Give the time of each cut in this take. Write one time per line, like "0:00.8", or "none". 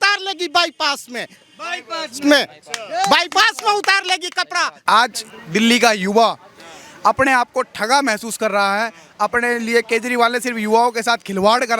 0:04.7